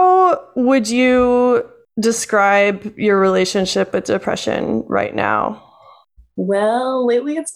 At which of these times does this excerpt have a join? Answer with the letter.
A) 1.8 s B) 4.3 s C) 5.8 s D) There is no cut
A